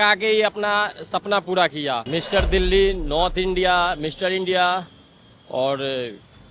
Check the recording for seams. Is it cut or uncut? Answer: cut